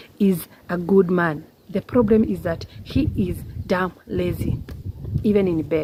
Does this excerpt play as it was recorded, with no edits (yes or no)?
yes